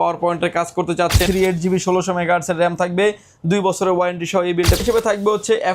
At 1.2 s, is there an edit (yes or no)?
yes